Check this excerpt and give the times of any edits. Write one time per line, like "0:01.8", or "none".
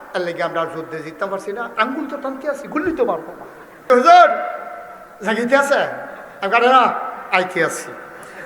0:03.9